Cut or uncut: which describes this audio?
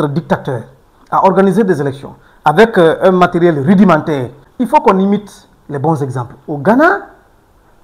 cut